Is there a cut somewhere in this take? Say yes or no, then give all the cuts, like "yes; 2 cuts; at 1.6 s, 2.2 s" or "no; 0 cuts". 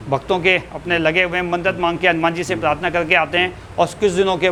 no; 0 cuts